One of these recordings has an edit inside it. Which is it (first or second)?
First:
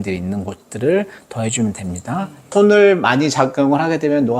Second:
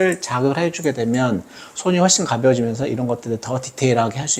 first